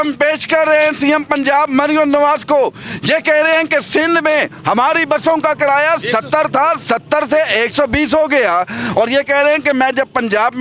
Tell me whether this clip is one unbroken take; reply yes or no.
yes